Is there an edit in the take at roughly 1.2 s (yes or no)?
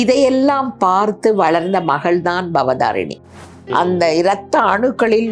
no